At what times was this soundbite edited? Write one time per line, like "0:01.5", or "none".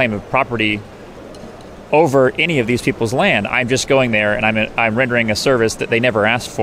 none